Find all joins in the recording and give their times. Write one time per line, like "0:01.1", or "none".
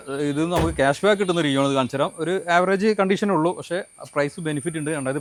none